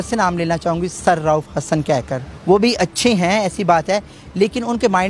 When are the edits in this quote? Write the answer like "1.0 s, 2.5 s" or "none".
2.2 s